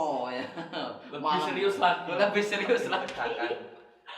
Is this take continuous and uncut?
yes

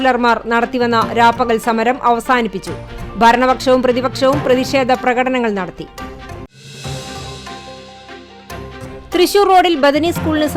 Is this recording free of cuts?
yes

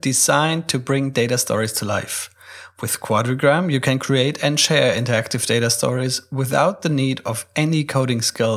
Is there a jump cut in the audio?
no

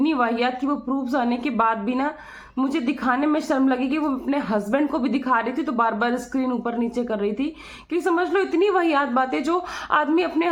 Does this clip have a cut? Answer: no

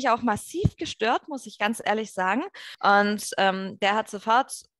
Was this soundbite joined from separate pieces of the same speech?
yes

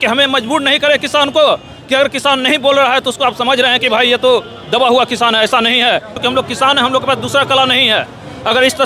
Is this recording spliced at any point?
yes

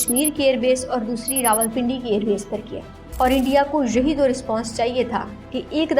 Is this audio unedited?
no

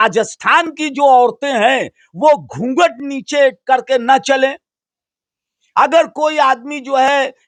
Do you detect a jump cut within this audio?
no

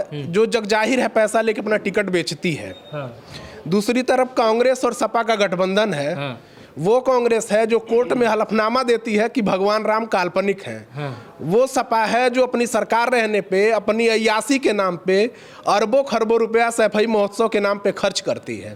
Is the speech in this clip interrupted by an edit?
no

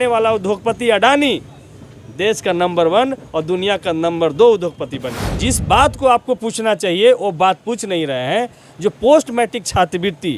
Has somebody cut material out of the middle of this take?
yes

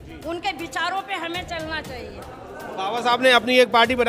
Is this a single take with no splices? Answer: yes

